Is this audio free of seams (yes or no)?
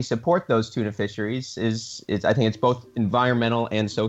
yes